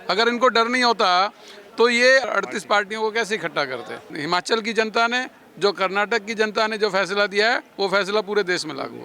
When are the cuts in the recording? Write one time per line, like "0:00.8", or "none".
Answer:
0:02.2
0:04.1